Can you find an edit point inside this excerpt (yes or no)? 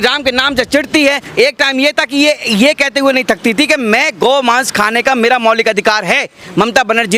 yes